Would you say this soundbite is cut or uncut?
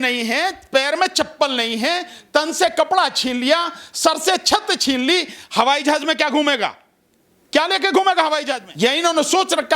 cut